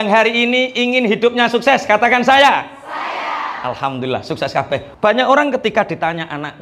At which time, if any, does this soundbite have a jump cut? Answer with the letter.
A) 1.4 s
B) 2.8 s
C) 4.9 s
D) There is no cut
C